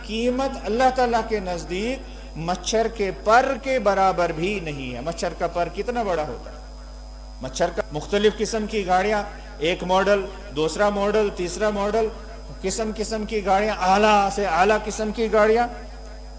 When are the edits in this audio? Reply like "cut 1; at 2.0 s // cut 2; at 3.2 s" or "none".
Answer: cut 1; at 7.8 s